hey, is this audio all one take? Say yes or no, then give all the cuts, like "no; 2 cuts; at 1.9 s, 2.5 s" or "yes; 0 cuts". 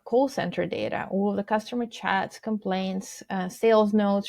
yes; 0 cuts